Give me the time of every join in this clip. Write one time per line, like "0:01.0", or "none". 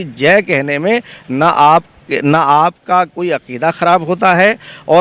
none